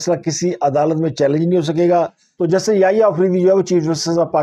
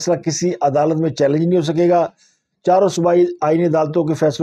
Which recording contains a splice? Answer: first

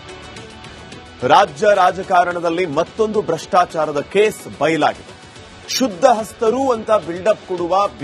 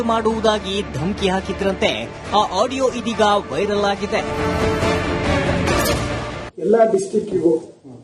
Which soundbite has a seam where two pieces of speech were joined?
first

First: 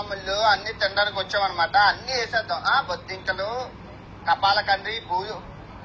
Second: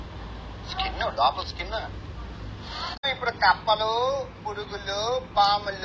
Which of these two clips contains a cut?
second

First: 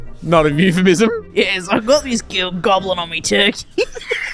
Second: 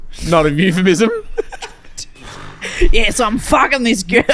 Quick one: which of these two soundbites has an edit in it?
first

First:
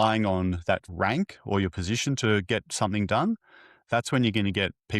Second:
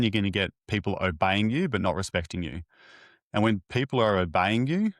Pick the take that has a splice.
first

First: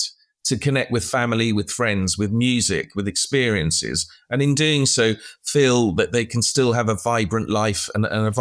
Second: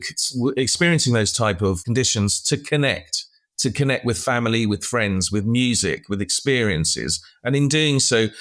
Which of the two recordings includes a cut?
second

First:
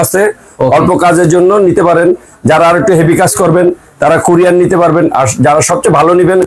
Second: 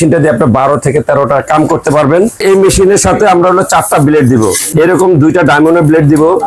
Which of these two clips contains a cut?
second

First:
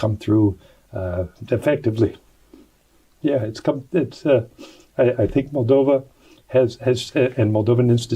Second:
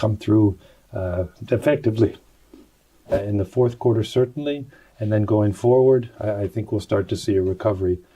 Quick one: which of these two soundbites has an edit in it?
second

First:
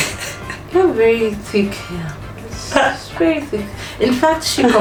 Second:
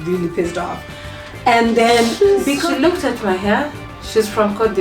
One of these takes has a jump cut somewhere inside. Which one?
second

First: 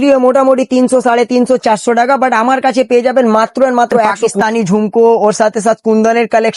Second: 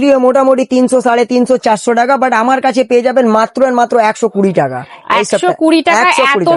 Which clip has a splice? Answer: first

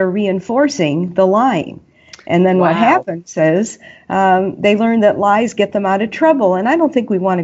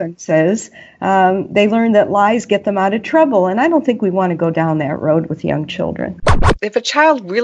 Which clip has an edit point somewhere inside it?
second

